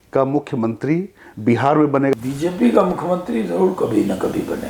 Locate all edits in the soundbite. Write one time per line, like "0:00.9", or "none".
0:02.1